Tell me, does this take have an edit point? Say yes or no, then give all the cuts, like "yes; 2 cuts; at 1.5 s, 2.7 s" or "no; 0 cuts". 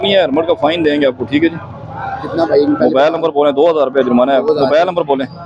no; 0 cuts